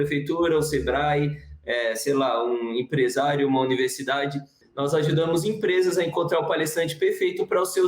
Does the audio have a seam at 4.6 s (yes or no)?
yes